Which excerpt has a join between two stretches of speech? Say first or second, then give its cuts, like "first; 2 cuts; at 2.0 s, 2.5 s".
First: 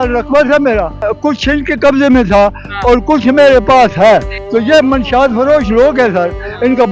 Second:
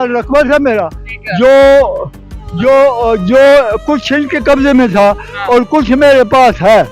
first; 2 cuts; at 1.1 s, 4.4 s